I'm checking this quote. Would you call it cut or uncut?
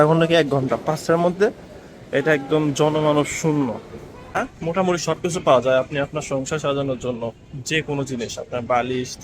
cut